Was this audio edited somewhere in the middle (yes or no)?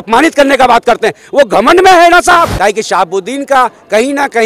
yes